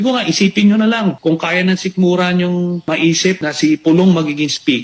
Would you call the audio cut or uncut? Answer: cut